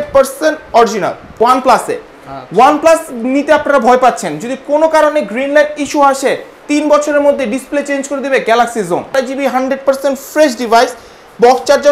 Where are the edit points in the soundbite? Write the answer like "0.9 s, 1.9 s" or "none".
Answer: 1.3 s, 9.1 s